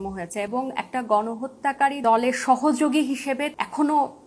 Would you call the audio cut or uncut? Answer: cut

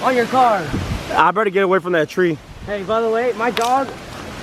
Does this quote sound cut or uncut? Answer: uncut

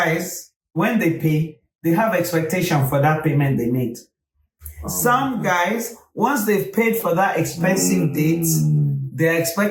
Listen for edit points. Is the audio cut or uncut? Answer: uncut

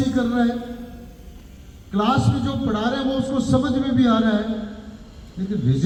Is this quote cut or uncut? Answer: uncut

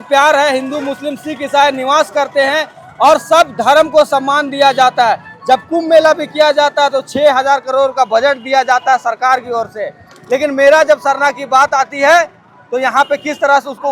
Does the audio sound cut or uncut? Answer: uncut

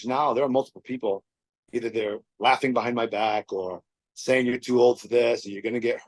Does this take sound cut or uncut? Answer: uncut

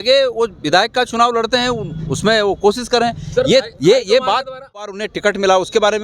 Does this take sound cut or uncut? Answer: cut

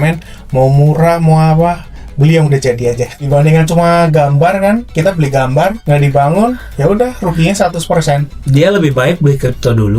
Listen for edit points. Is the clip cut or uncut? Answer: cut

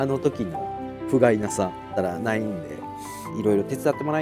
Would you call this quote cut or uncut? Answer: cut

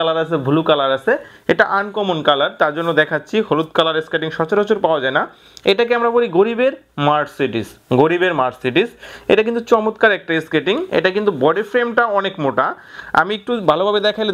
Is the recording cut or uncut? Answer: uncut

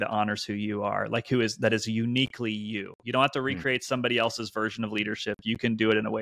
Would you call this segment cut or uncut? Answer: uncut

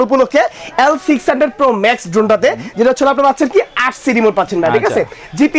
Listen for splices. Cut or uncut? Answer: uncut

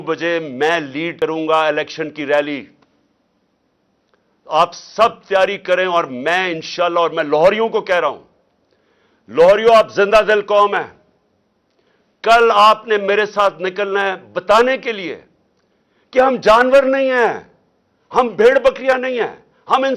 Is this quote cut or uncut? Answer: cut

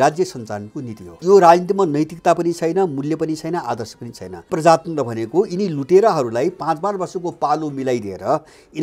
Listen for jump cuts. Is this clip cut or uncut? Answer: cut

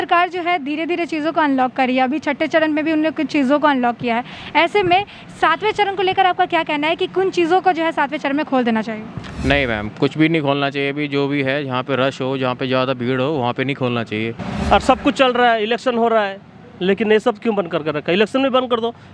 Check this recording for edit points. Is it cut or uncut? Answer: cut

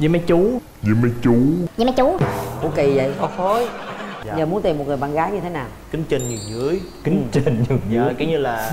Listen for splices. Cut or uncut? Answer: cut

